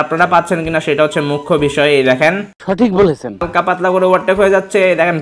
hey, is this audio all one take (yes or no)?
no